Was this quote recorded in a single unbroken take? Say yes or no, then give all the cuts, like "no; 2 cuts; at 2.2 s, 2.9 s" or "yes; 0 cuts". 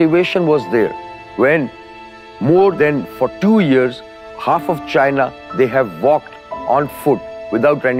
yes; 0 cuts